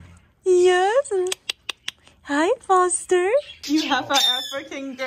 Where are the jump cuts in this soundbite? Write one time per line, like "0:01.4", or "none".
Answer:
0:03.6

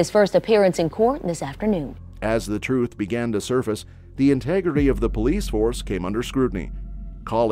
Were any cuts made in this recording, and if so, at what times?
none

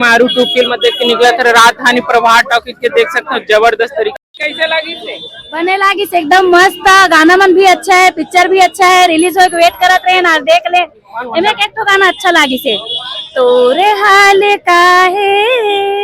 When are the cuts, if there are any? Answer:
0:04.1

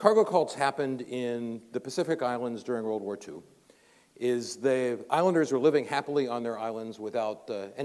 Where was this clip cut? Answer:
0:03.5

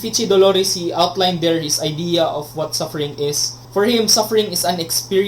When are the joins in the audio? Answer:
0:03.5

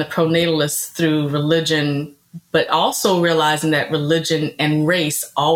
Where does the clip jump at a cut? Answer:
none

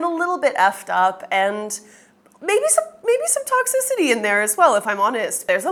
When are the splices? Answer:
none

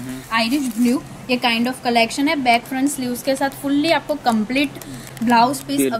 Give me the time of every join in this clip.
none

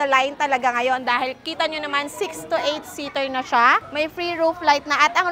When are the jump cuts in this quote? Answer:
0:03.9

